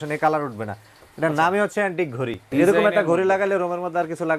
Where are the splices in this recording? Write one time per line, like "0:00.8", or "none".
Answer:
0:02.5